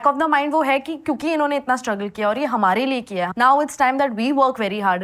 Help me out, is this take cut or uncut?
cut